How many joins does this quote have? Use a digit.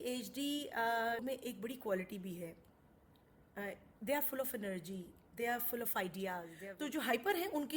2